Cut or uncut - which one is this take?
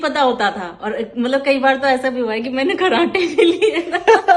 uncut